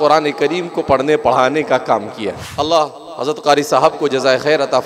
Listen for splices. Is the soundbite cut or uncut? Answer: cut